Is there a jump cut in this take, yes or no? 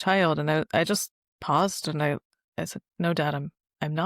yes